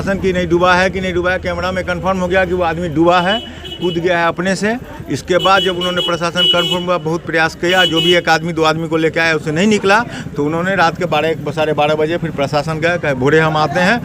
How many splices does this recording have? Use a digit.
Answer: 0